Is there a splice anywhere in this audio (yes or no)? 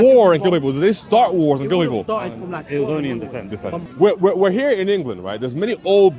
yes